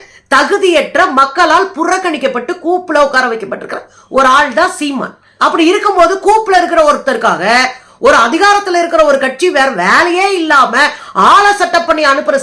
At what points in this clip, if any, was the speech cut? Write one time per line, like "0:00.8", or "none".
none